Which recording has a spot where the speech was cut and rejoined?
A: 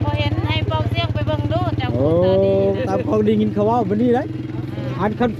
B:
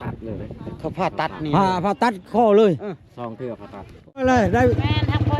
B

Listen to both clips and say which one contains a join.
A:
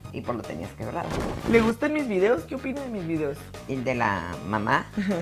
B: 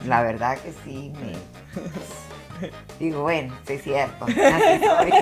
A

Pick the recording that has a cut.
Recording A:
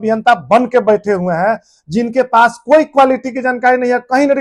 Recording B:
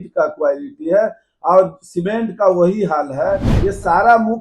B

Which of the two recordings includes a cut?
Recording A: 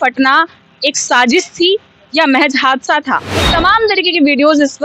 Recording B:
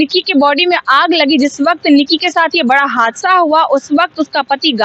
A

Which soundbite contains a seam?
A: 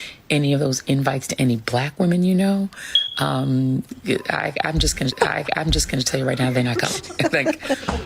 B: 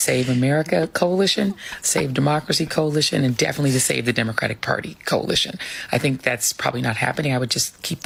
A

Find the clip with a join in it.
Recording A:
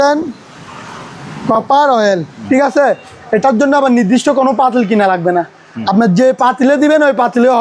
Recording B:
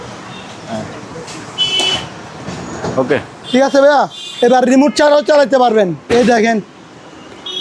A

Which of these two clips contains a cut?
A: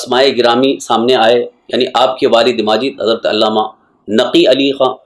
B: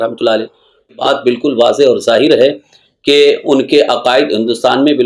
B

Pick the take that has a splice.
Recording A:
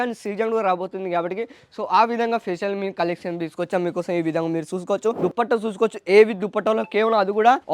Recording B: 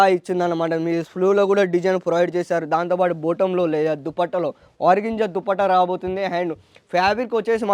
A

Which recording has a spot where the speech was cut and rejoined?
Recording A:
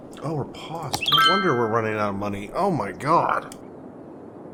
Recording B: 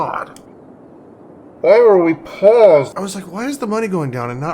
B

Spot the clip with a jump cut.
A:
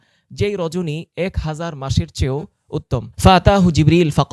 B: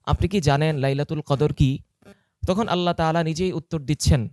A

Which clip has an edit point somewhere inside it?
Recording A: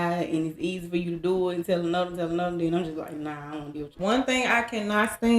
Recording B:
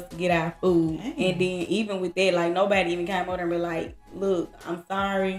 A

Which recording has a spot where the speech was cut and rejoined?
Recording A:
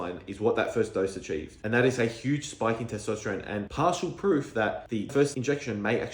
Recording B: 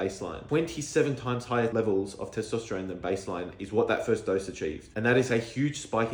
A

